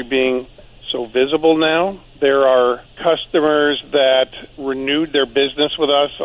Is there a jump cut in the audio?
yes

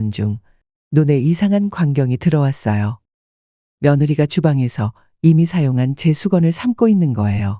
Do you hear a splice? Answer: no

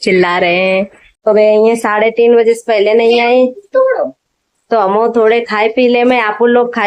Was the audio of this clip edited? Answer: yes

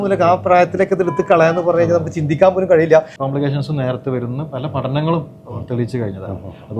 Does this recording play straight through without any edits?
no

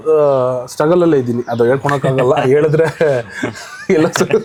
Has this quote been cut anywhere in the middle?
no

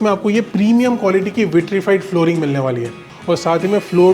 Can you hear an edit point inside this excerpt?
yes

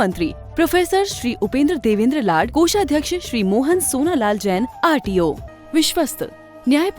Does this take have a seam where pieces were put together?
yes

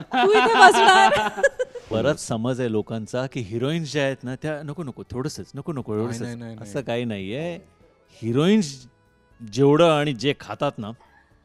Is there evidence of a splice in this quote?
yes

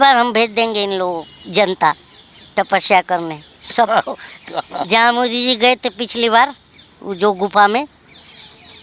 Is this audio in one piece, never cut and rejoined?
yes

